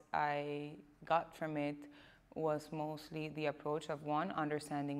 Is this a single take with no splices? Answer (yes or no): yes